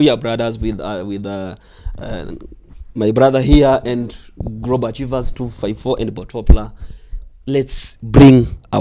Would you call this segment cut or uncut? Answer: uncut